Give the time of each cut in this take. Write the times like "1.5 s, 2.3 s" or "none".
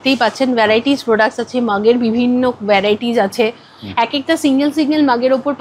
none